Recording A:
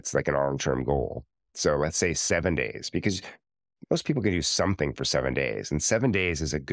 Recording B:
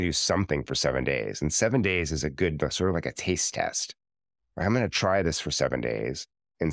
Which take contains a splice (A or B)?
A